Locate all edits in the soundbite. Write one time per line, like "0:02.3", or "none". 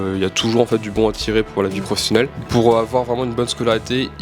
0:02.3